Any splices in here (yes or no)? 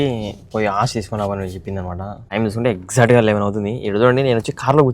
yes